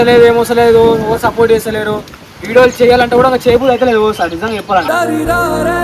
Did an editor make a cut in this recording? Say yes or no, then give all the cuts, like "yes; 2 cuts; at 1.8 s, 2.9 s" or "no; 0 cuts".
no; 0 cuts